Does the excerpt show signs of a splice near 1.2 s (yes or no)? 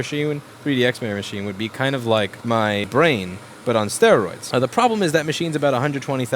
no